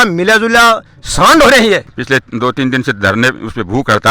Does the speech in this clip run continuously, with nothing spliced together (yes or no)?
no